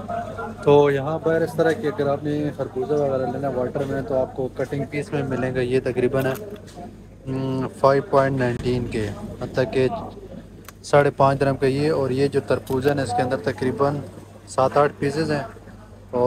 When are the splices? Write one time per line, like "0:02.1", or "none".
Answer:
none